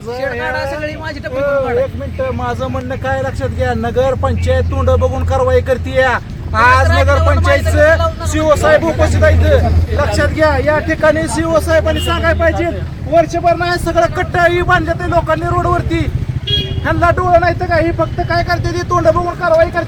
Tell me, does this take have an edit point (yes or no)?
no